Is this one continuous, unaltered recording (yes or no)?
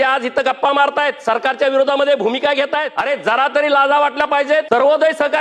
no